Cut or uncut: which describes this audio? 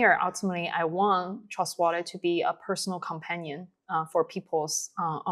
uncut